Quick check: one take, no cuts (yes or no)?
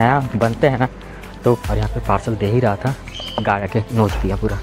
no